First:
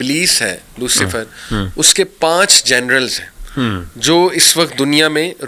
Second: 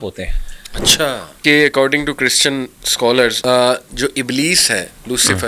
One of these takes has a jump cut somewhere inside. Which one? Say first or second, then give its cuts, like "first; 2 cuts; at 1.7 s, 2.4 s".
second; 2 cuts; at 1.4 s, 3.4 s